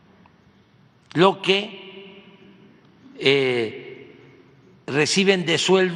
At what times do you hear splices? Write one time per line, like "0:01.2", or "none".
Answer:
none